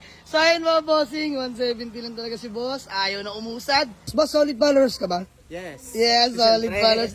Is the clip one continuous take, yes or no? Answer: no